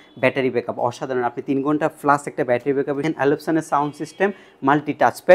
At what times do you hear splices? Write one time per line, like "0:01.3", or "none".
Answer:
0:03.0